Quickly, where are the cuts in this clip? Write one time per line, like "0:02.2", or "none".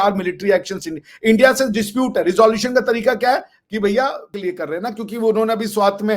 0:04.3